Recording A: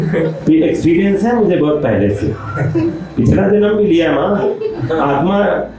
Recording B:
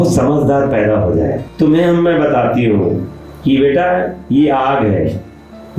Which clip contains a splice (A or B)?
B